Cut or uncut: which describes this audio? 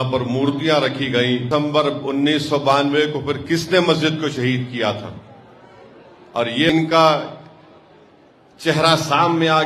cut